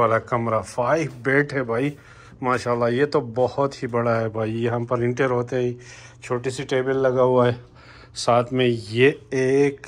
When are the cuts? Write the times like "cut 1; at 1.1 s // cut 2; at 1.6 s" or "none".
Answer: none